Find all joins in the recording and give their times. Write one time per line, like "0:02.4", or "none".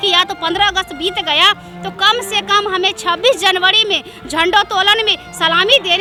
none